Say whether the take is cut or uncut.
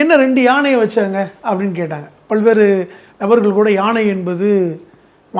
uncut